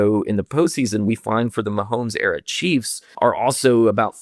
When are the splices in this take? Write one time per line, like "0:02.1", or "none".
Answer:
0:03.0